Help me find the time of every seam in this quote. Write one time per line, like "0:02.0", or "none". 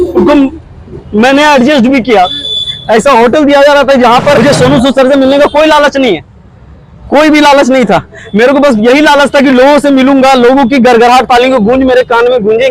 0:04.4